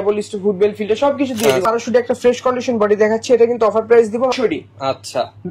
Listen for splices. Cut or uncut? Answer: cut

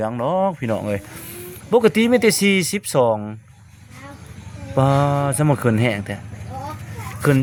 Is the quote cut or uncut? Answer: uncut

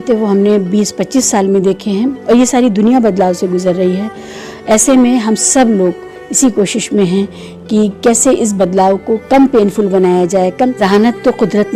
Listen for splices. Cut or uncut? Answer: cut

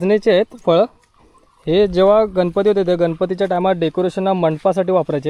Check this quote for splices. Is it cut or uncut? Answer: uncut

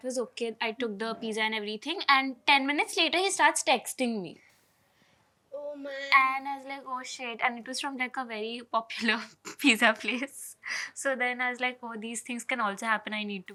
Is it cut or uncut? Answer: uncut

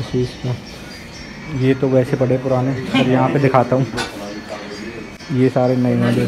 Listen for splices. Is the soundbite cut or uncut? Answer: uncut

